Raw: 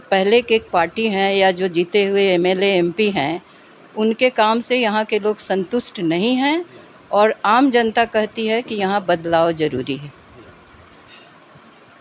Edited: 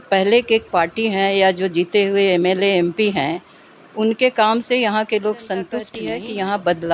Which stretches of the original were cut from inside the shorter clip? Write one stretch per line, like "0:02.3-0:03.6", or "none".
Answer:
0:05.9-0:08.4